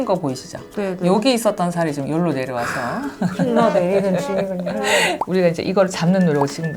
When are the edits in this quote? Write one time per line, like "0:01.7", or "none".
0:05.2